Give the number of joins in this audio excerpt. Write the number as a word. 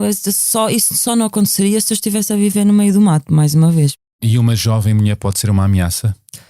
one